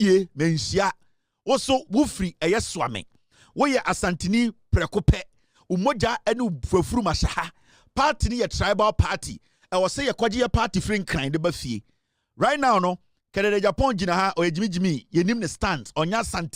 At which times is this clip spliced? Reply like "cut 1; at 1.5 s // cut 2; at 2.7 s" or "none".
none